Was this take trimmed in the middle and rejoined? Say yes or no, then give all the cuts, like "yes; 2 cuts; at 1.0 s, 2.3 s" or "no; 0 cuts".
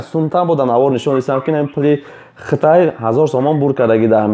no; 0 cuts